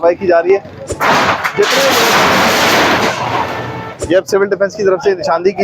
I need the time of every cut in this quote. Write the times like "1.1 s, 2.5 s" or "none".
0.9 s, 3.9 s